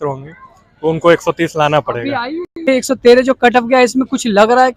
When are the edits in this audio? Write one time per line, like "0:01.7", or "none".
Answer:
0:02.6